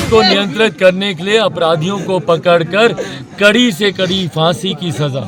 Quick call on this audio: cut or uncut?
uncut